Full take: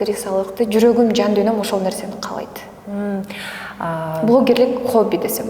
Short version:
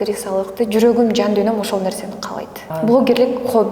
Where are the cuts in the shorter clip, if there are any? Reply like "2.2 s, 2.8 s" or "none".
2.7 s